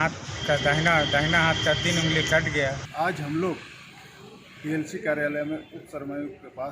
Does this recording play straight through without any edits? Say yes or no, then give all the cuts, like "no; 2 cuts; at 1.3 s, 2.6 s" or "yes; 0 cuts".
no; 1 cut; at 2.8 s